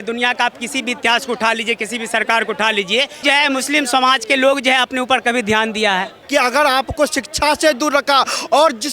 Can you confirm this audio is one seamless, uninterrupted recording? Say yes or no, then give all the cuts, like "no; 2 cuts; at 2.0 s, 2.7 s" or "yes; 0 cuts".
no; 2 cuts; at 3.2 s, 6.2 s